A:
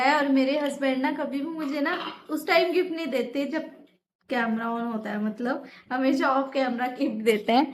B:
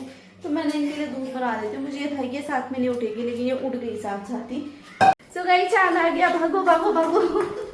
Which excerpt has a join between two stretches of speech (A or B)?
B